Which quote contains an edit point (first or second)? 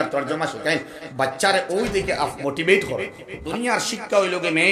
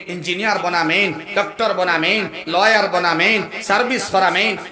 first